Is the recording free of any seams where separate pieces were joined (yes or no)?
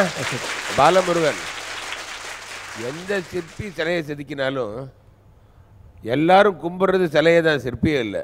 yes